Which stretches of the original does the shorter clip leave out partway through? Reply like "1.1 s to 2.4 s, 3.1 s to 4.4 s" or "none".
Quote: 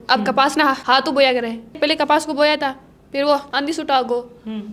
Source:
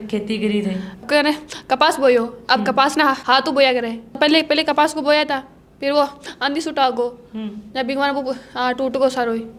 4.2 s to 4.4 s, 6.2 s to 6.4 s